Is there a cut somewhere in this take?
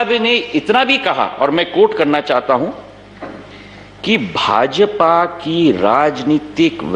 no; 0 cuts

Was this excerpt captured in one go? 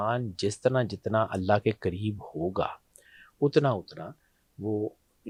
yes; 0 cuts

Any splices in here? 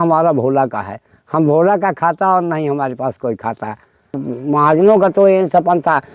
yes; 1 cut; at 4.3 s

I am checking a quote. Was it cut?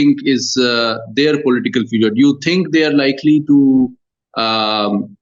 no; 0 cuts

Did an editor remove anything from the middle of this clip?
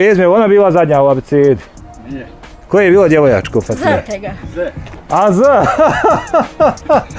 no; 0 cuts

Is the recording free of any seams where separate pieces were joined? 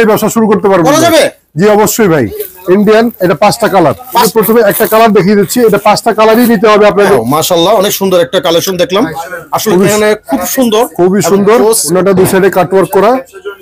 no; 4 cuts; at 2.4 s, 4.3 s, 7.2 s, 11.9 s

